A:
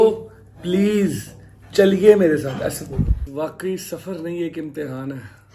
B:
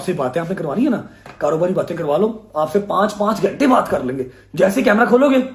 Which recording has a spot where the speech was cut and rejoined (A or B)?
A